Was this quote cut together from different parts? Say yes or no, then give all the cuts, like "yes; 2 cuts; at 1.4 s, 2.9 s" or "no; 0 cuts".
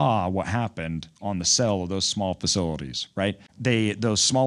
yes; 1 cut; at 3.5 s